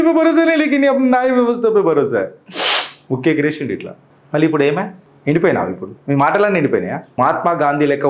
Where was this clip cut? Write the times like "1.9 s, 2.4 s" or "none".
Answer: 5.0 s, 7.2 s